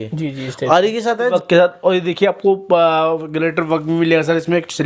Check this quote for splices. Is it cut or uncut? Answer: cut